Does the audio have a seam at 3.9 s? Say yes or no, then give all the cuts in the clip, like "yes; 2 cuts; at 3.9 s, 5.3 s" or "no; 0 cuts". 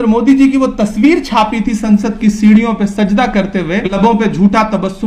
yes; 1 cut; at 3.9 s